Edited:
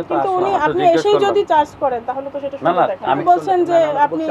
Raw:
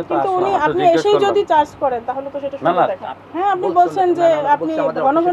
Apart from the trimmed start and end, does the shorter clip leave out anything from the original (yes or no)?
yes